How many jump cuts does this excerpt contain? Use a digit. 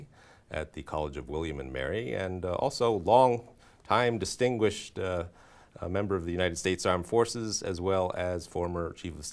0